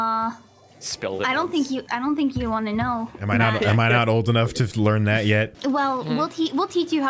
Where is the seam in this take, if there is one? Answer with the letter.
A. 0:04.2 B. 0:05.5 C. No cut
B